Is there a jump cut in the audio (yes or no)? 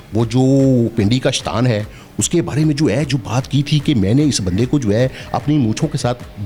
no